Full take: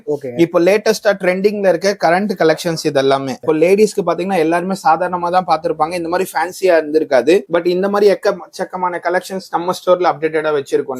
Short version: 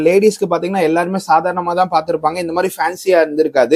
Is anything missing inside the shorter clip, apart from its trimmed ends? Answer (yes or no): no